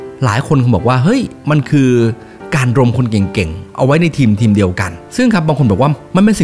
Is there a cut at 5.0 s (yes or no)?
yes